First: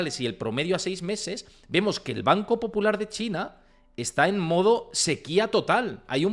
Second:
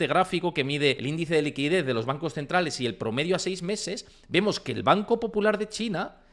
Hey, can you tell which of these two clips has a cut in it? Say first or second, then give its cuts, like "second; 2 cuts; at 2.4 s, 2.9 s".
second; 1 cut; at 1.0 s